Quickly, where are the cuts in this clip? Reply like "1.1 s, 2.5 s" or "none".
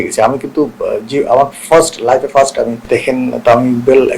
2.8 s